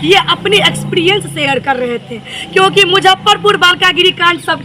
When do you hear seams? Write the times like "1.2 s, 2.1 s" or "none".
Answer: none